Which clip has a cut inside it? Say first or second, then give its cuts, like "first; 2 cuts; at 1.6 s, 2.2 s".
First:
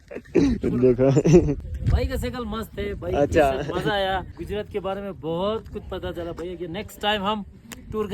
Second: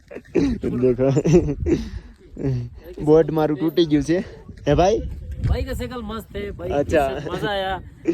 first; 2 cuts; at 1.6 s, 4.3 s